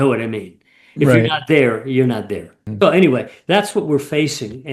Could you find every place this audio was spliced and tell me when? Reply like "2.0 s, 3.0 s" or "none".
2.6 s